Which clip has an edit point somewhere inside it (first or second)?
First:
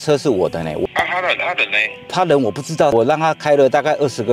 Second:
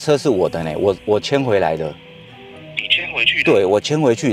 first